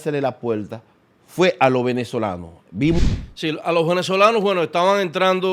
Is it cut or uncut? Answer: cut